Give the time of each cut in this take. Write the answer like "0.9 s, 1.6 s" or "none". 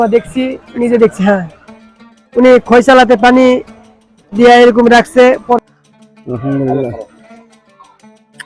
5.6 s